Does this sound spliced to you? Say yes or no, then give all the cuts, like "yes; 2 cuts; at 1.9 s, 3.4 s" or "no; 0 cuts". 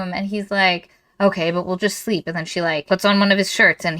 yes; 1 cut; at 2.8 s